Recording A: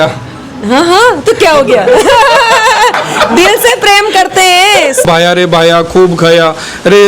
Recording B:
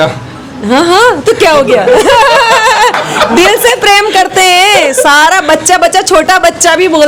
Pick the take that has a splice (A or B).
A